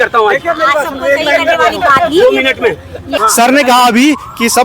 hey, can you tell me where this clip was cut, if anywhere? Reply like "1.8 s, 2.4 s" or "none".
3.1 s